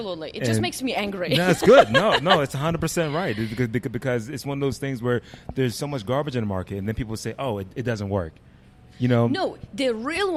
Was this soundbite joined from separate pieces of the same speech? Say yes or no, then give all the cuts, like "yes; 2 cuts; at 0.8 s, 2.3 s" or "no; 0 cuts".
no; 0 cuts